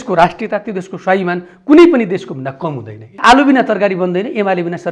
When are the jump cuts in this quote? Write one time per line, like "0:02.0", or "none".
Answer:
0:03.2